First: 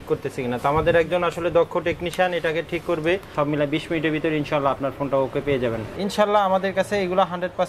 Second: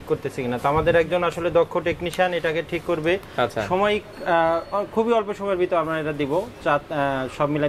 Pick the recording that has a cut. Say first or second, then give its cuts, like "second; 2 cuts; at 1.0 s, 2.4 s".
first; 2 cuts; at 3.3 s, 5.9 s